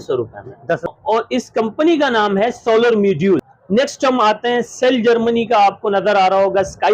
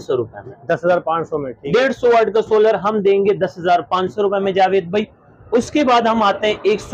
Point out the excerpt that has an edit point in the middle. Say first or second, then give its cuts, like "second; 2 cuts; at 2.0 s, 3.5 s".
first; 2 cuts; at 0.9 s, 3.5 s